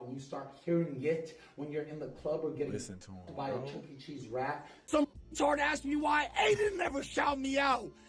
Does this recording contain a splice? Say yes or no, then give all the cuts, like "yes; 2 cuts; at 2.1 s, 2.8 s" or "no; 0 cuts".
yes; 1 cut; at 4.7 s